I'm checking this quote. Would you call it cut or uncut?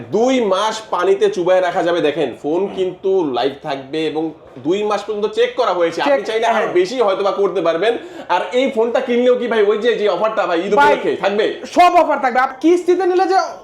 cut